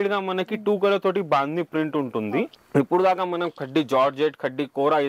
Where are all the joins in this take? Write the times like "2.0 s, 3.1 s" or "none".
2.5 s